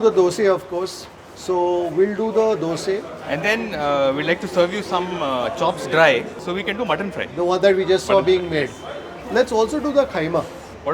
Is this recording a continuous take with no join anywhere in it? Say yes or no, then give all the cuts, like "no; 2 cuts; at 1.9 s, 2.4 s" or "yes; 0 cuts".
yes; 0 cuts